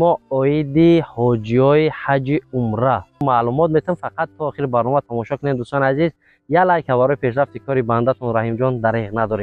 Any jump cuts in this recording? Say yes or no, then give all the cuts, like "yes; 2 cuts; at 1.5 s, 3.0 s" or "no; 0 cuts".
yes; 1 cut; at 3.2 s